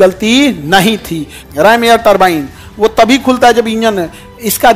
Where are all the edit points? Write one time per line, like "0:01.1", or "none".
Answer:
0:01.4